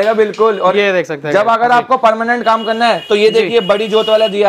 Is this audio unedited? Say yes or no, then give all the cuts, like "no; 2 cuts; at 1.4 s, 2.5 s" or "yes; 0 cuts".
yes; 0 cuts